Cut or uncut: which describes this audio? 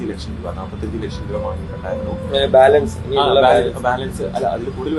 uncut